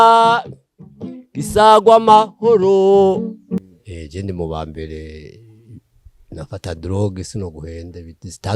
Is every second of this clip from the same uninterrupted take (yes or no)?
no